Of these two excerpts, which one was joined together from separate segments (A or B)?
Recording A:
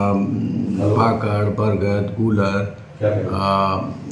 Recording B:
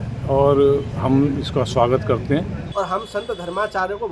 B